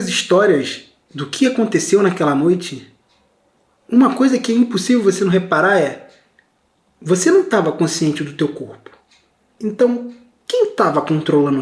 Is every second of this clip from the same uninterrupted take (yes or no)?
yes